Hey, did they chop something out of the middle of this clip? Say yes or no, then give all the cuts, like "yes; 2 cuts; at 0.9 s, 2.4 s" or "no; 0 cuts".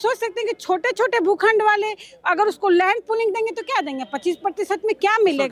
no; 0 cuts